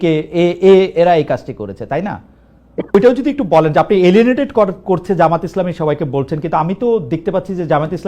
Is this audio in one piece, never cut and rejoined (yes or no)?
no